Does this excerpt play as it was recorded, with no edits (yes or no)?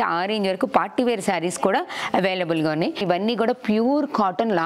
no